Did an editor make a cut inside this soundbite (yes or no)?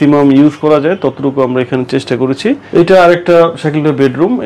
yes